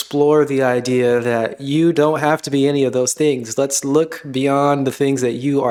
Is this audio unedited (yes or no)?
yes